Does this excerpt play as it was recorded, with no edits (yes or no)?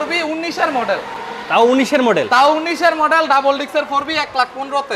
yes